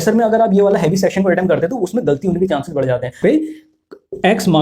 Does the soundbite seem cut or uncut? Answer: cut